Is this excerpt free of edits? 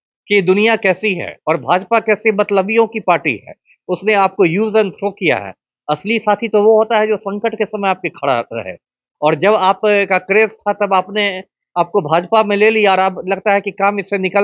yes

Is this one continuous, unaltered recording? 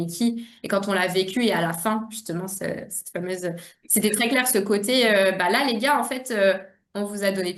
yes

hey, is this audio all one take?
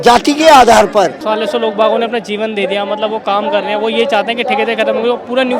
no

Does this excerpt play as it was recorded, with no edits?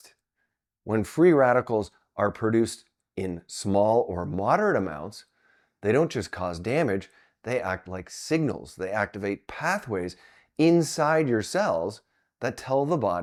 yes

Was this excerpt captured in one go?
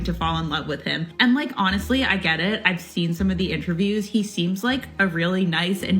no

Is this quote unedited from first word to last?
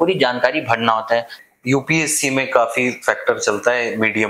no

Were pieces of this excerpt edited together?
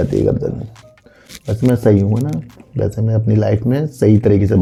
no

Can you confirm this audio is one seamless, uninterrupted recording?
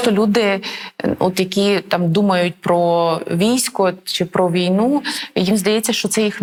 yes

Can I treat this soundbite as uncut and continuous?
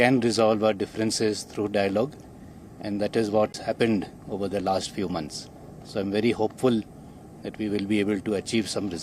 no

